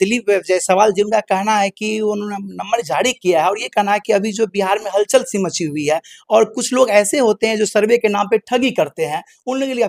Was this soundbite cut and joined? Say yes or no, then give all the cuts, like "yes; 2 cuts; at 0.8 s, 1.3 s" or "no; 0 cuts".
no; 0 cuts